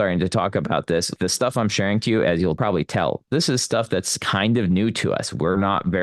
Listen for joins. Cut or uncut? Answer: cut